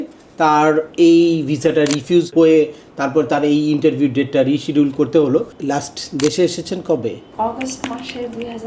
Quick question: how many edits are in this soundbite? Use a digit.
3